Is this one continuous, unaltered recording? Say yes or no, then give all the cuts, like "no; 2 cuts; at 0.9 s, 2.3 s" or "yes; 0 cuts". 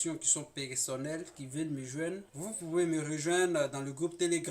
no; 1 cut; at 2.3 s